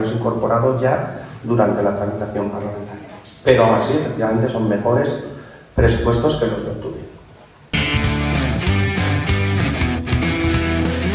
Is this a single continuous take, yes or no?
yes